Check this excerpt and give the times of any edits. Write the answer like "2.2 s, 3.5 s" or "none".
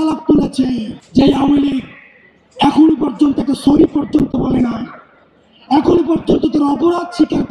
0.9 s